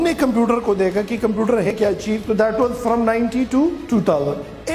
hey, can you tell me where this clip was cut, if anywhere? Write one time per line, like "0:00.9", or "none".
0:01.7